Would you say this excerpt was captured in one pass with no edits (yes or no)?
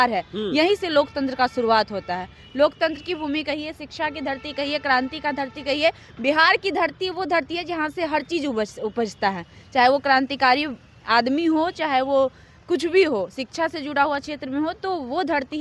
yes